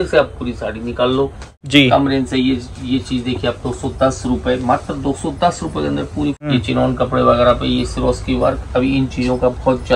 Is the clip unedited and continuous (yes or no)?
no